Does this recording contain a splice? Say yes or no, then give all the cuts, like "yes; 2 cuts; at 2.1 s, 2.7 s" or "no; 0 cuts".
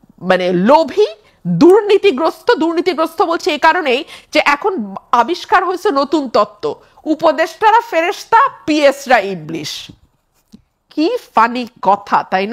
no; 0 cuts